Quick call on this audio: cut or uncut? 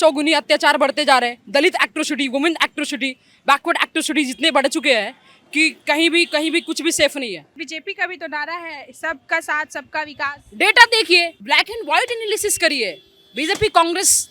cut